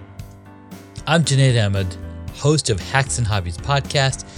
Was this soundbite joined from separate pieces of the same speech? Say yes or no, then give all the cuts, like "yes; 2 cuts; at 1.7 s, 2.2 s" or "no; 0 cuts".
yes; 1 cut; at 1.0 s